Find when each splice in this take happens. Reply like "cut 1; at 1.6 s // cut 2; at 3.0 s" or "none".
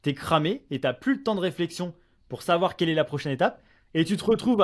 none